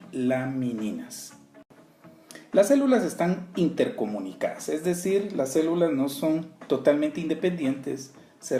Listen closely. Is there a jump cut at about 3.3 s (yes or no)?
yes